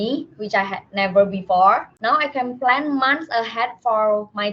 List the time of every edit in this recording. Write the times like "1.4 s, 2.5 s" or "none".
1.9 s